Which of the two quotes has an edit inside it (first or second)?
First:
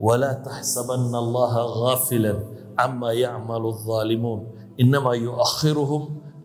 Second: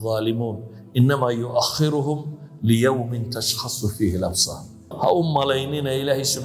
second